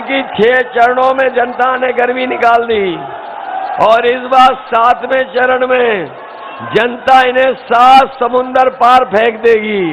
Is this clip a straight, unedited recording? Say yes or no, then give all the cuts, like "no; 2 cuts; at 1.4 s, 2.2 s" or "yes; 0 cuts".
yes; 0 cuts